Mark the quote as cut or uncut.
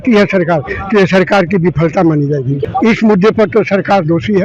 cut